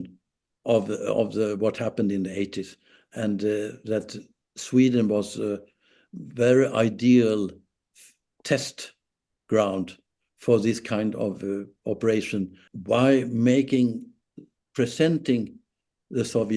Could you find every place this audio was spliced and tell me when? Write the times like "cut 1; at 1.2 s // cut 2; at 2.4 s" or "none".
cut 1; at 12.6 s